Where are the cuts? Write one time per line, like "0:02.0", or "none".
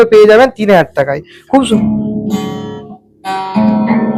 none